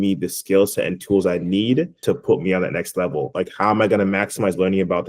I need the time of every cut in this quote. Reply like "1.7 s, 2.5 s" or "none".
1.9 s, 3.3 s